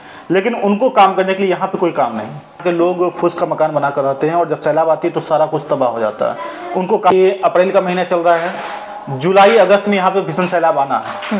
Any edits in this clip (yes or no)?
yes